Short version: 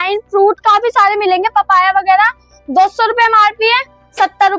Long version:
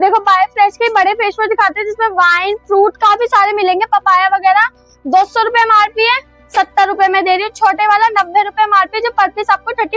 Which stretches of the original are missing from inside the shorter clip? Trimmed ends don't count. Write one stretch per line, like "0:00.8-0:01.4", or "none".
none